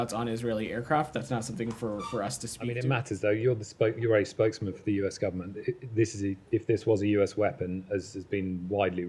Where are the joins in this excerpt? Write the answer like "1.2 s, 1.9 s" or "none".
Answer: 2.8 s